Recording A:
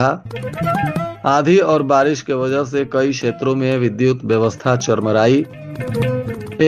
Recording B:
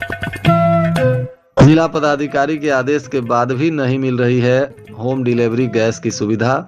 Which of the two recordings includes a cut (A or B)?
B